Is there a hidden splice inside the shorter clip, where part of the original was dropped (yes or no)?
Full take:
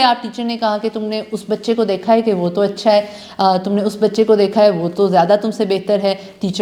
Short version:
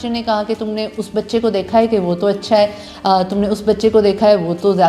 no